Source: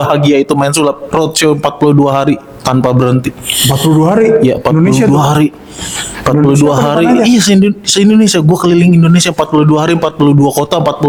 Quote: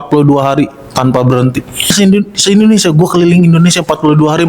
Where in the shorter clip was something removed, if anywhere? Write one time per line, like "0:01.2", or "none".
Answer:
0:01.9